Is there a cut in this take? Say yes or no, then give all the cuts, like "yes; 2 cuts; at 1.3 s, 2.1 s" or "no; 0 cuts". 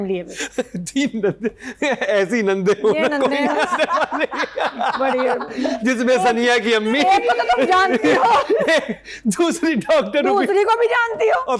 no; 0 cuts